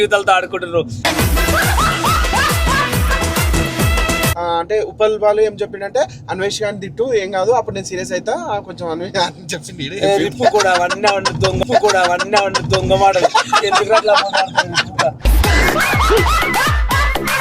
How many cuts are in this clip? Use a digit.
2